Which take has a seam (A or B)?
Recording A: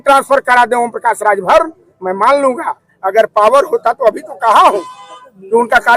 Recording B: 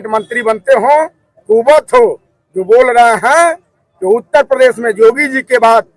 A